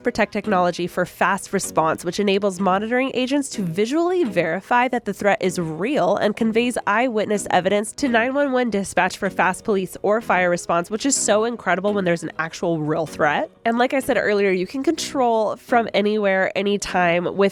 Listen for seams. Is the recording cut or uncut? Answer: uncut